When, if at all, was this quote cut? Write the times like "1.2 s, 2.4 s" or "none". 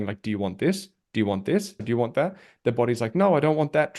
1.8 s

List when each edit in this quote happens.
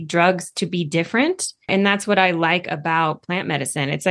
1.7 s

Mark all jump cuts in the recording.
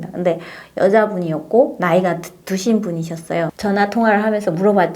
3.5 s

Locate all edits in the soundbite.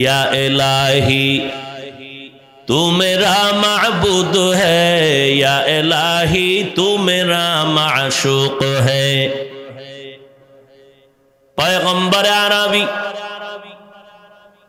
none

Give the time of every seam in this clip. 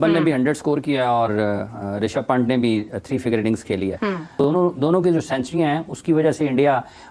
4.3 s

